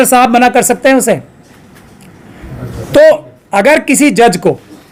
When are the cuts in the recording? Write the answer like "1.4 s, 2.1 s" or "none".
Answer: none